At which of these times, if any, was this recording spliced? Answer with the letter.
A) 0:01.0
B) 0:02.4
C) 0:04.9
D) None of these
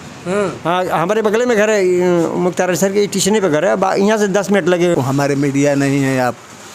C